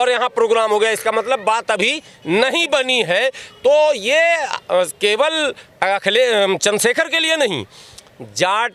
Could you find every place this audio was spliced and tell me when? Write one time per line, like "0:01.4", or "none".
none